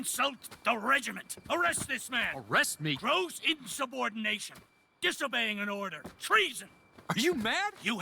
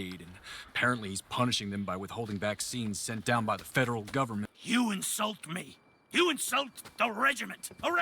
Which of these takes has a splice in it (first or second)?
second